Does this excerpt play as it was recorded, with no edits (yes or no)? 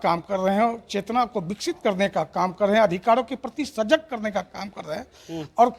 yes